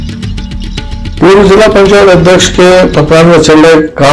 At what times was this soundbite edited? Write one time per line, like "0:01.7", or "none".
0:01.1